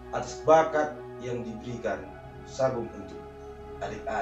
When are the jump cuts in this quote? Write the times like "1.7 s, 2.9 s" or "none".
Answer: none